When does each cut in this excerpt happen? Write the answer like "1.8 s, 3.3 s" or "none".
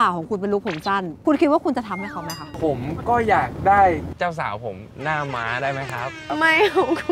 1.1 s, 1.9 s, 6.2 s